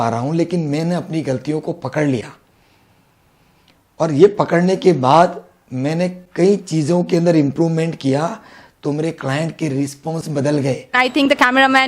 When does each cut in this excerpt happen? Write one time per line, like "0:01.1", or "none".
0:10.9

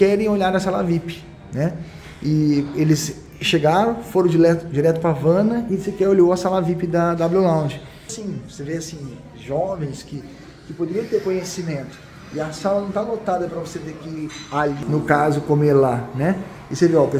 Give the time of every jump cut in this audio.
none

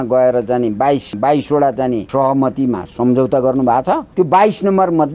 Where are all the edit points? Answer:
0:01.1
0:02.1
0:04.1

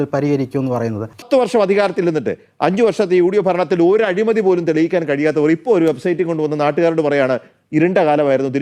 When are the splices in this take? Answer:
0:01.1

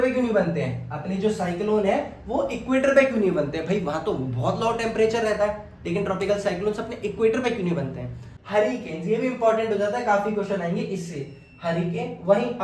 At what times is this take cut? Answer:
0:08.3

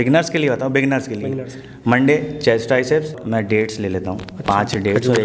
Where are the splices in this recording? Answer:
0:03.2

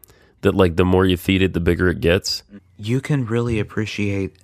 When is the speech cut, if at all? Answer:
0:02.4

